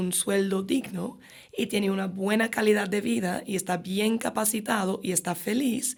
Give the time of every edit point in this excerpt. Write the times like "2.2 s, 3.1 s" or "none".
none